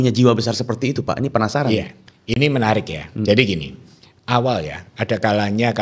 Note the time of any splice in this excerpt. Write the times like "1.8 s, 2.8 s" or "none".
none